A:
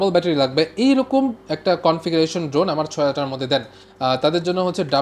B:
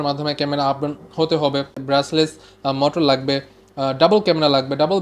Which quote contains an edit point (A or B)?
B